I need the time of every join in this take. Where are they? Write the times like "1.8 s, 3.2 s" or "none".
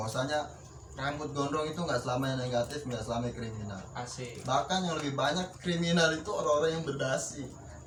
none